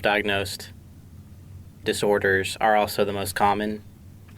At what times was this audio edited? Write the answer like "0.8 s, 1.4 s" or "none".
1.8 s